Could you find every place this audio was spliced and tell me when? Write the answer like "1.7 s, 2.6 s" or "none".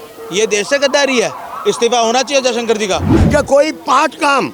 3.1 s